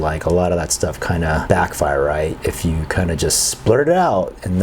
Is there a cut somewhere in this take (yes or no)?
yes